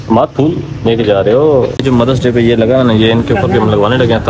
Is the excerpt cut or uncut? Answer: cut